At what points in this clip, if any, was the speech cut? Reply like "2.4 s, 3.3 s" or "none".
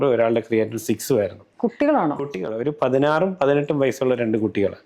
2.8 s